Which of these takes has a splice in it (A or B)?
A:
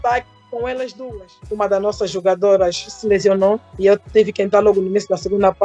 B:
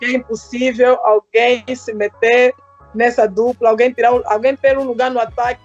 A